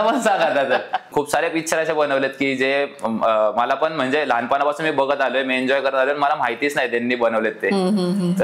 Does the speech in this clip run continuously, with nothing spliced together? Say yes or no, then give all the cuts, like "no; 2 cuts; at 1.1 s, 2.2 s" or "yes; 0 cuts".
no; 1 cut; at 1.1 s